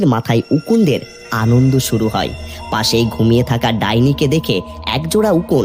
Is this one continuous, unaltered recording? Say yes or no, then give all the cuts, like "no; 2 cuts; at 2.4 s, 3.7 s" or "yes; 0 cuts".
yes; 0 cuts